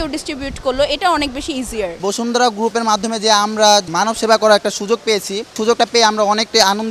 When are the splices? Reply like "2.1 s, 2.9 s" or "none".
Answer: 1.9 s, 3.9 s, 5.6 s